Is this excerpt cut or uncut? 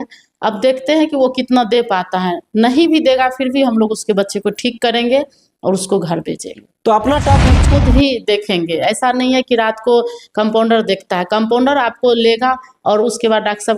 cut